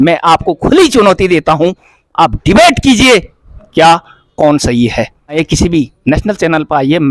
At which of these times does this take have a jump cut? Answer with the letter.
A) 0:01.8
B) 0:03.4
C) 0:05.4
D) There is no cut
C